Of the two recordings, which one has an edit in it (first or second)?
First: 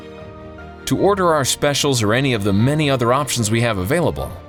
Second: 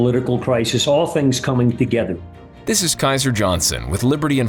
second